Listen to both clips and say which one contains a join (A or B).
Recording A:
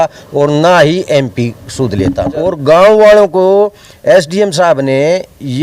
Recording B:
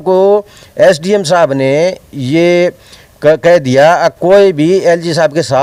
A